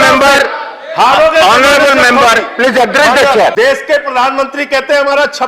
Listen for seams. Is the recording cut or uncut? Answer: cut